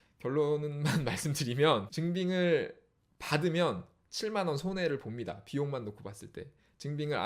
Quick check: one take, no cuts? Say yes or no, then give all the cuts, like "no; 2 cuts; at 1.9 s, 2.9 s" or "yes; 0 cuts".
no; 1 cut; at 1.9 s